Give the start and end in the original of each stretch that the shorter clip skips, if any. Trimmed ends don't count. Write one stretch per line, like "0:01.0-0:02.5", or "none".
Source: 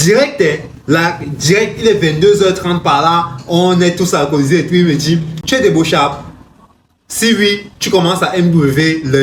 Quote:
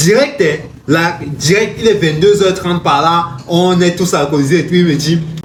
none